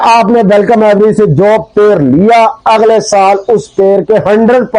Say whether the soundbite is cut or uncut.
uncut